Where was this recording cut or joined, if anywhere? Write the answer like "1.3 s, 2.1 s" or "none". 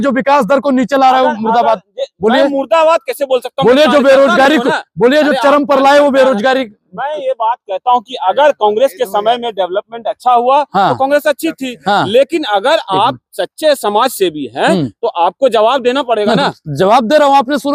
none